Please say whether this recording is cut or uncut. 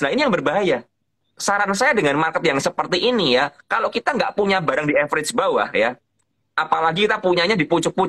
cut